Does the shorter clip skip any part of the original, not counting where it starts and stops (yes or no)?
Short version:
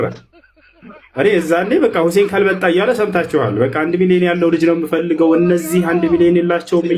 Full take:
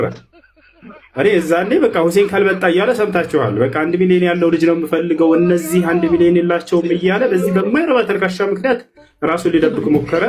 no